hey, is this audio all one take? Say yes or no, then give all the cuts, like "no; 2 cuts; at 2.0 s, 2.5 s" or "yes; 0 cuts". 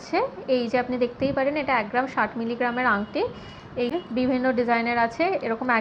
no; 1 cut; at 3.9 s